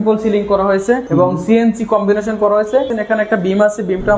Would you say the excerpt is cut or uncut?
cut